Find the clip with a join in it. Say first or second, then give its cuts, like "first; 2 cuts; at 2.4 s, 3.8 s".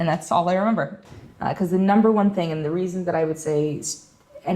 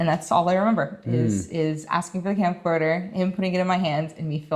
first; 1 cut; at 1.0 s